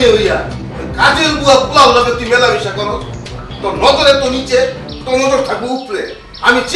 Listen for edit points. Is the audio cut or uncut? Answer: uncut